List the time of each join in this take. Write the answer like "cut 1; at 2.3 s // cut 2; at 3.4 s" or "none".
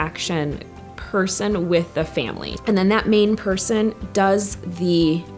cut 1; at 2.4 s